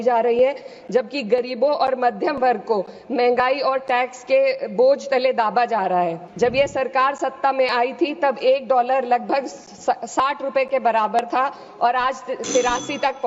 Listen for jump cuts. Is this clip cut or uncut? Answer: cut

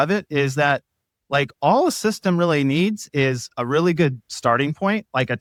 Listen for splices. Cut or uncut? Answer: uncut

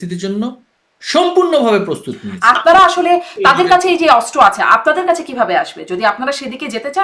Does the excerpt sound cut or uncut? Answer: cut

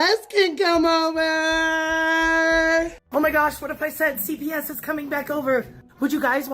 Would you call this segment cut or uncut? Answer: cut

